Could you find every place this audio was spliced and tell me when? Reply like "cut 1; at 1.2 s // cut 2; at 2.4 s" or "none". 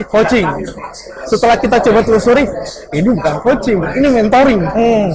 none